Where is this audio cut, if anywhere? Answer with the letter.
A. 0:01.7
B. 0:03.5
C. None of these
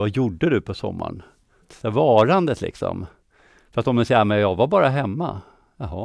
A